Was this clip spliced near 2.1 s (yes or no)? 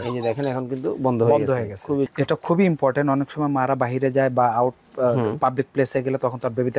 yes